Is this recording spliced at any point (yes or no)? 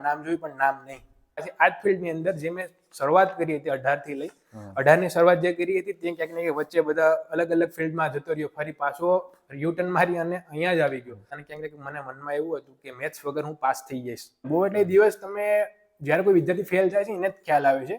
yes